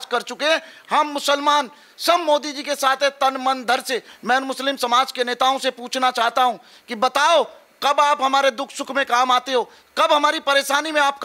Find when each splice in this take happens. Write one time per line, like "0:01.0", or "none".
0:04.1